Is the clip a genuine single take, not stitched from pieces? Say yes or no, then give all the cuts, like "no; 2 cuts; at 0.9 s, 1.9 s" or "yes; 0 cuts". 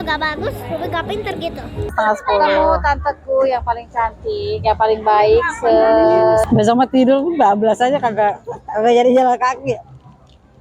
no; 2 cuts; at 1.9 s, 6.5 s